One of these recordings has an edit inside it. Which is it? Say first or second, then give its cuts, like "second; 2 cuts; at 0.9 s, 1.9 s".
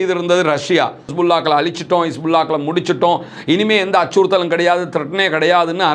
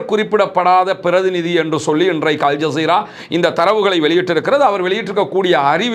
first; 1 cut; at 1.1 s